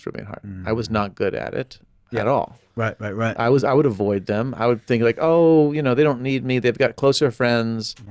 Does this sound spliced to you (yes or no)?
no